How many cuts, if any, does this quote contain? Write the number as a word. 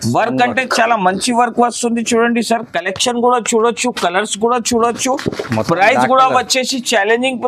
zero